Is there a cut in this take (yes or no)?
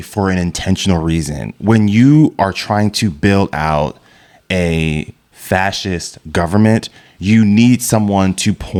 no